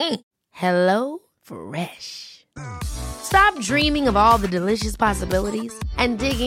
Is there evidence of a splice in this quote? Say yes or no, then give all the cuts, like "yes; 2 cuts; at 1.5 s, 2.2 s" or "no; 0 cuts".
no; 0 cuts